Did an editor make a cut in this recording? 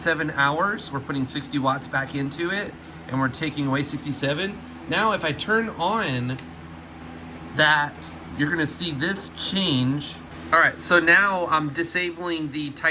yes; 1 cut; at 10.3 s

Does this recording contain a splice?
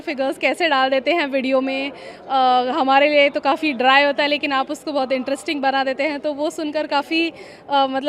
no; 0 cuts

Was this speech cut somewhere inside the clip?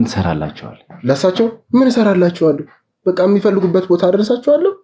no; 0 cuts

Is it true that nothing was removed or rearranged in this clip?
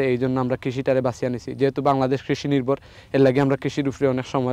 yes; 0 cuts

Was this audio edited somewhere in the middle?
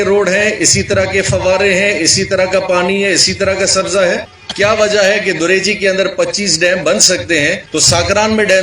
yes; 2 cuts; at 4.4 s, 7.6 s

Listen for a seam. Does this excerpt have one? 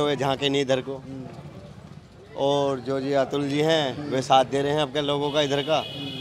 no; 0 cuts

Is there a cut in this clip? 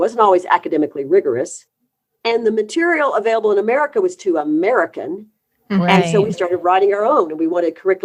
no; 0 cuts

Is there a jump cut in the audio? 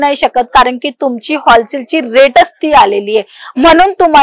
no; 0 cuts

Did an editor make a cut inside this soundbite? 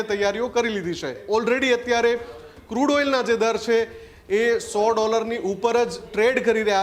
yes; 1 cut; at 1.2 s

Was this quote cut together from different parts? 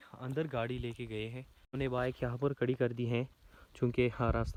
no; 0 cuts

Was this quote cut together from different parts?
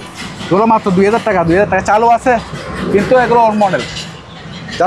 no; 0 cuts

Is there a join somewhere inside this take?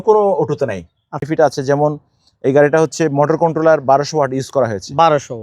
yes; 1 cut; at 1.3 s

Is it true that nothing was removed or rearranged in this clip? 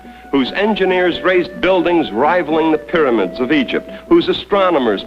no; 1 cut; at 1.9 s

